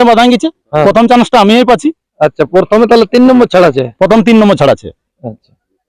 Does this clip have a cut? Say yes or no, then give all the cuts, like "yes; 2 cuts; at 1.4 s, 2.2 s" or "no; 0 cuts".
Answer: no; 0 cuts